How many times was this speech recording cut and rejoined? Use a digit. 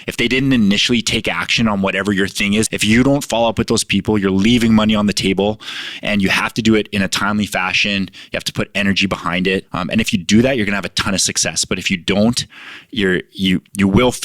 2